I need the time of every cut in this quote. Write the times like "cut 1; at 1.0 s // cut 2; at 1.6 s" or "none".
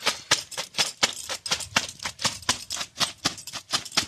none

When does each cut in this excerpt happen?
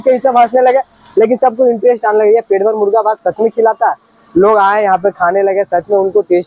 none

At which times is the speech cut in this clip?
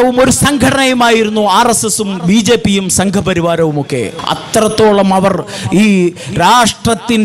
cut 1; at 4.2 s

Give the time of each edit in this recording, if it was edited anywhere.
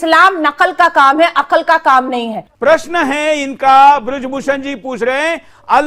cut 1; at 2.4 s

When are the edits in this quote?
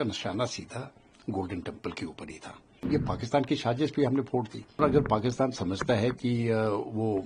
cut 1; at 2.8 s // cut 2; at 4.8 s

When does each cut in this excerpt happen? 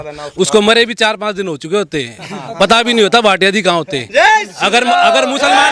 none

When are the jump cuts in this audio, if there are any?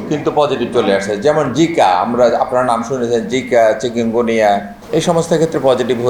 cut 1; at 4.8 s

